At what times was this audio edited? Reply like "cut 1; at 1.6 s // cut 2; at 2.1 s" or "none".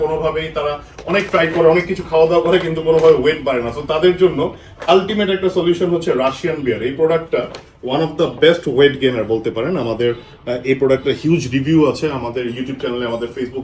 none